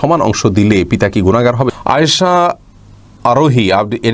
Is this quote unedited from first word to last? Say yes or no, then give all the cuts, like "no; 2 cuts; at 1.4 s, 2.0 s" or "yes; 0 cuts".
no; 1 cut; at 1.7 s